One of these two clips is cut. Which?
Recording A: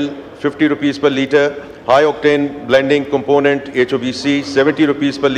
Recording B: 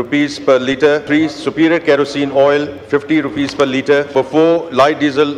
B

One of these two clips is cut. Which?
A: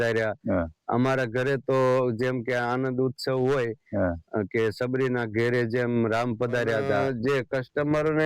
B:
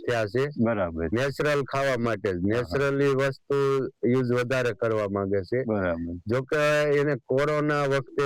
A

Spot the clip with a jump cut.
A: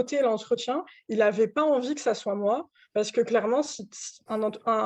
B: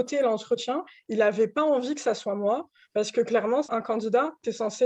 B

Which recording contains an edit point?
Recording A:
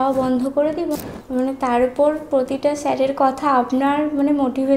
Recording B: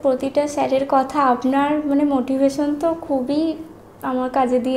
A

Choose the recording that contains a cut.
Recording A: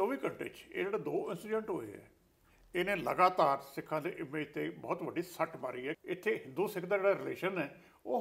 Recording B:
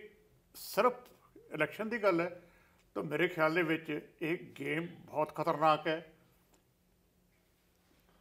A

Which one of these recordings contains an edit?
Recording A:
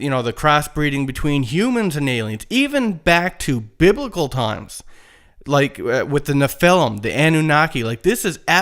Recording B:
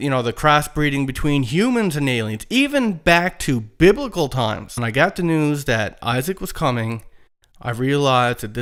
A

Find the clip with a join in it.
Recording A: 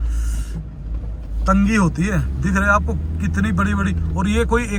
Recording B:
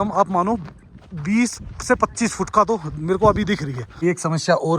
B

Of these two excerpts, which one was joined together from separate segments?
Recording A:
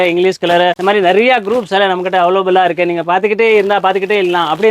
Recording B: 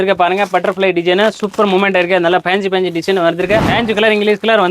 B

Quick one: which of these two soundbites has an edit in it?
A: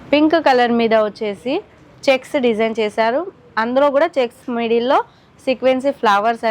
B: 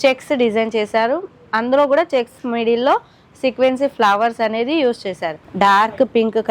B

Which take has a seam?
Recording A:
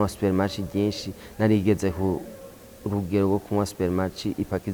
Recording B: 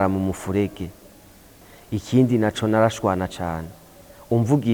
B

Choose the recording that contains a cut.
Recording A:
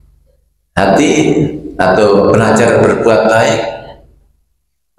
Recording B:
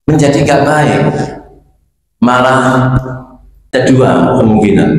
B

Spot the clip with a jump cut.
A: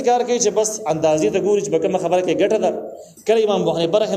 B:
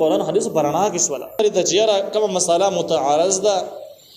B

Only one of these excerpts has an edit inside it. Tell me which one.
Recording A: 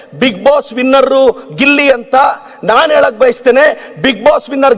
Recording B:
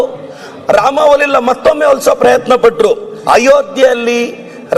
B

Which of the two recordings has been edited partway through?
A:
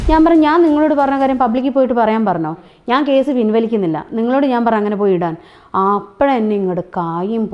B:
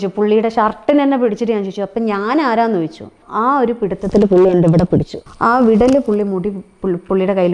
B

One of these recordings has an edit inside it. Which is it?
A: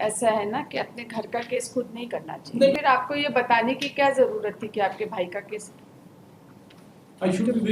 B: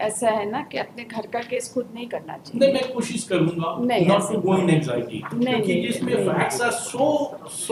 A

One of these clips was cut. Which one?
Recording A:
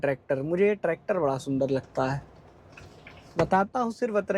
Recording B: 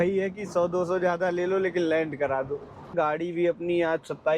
B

